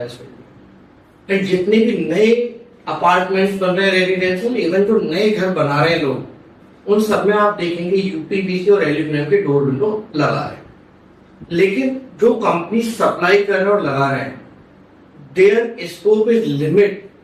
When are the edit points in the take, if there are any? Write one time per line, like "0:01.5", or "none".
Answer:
none